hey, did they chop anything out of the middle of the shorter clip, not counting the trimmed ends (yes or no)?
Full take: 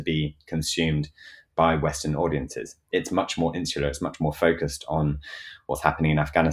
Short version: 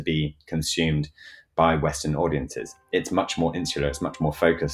no